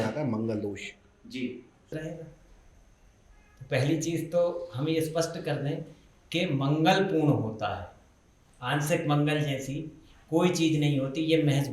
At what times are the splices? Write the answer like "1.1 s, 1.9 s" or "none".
1.8 s

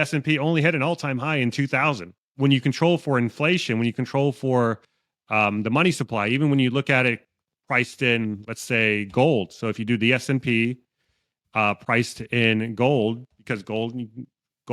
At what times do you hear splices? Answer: 2.3 s

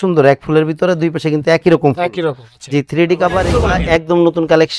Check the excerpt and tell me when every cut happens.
3.5 s

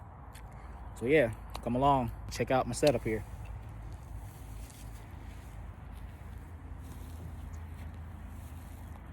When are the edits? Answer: 2.2 s

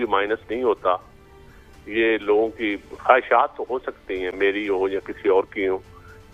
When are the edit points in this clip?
none

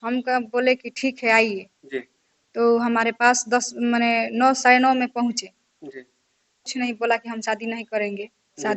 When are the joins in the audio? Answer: 6.7 s

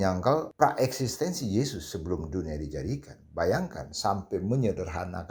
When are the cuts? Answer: none

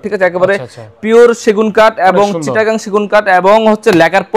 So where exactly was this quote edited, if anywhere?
none

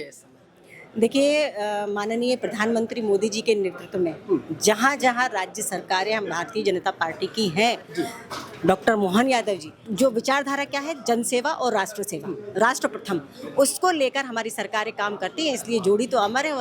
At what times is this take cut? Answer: 9.8 s

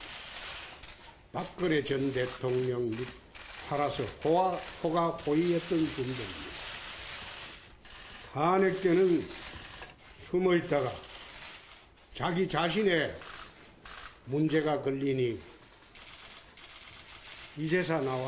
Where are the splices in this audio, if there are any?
8.0 s

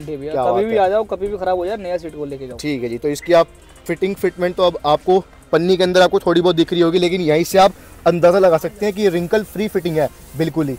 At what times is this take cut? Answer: none

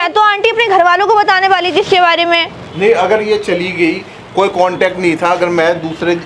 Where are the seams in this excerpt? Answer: 2.6 s

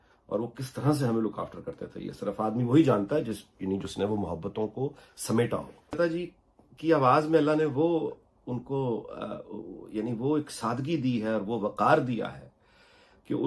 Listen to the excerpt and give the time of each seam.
6.0 s

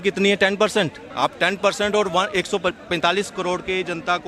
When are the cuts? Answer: 1.0 s

